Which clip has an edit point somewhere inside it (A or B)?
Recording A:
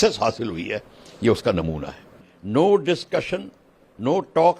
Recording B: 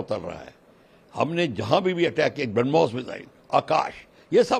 A